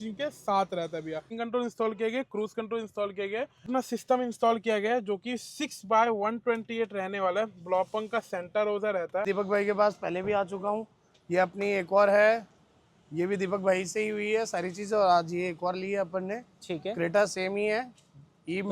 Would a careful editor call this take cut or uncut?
cut